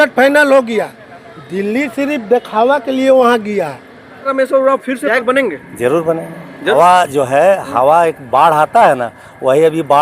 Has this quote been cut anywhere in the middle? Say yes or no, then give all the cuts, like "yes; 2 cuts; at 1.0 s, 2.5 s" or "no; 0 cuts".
yes; 3 cuts; at 4.3 s, 5.1 s, 6.7 s